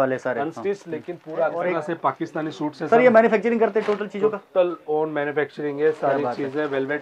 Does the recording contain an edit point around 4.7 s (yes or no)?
no